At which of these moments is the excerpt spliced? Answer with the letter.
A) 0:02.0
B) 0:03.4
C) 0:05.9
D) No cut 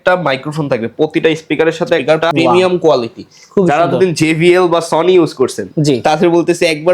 A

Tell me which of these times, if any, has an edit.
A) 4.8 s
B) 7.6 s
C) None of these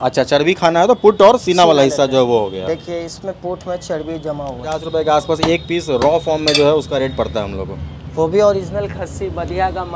A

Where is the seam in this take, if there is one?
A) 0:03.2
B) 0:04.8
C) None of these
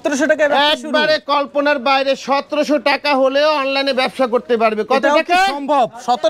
C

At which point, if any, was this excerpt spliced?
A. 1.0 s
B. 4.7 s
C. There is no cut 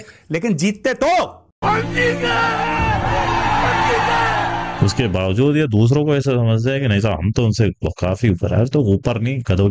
B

